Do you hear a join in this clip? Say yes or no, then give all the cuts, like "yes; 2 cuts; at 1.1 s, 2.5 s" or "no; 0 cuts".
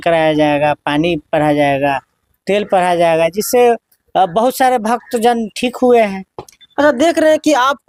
no; 0 cuts